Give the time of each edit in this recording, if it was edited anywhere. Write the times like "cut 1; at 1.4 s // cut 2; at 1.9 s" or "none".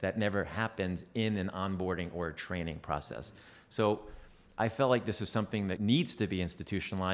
cut 1; at 5.8 s